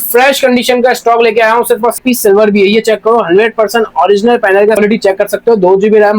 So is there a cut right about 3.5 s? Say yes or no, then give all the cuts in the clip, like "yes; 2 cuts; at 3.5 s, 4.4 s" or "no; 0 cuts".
no; 2 cuts; at 2.0 s, 4.8 s